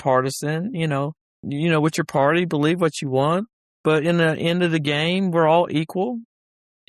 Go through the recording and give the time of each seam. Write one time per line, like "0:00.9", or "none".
0:01.2